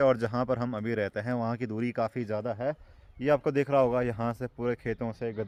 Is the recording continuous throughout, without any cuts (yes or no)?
yes